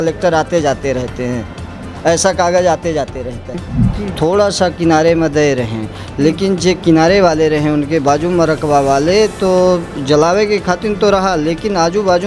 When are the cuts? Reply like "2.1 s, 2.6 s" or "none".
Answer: 3.7 s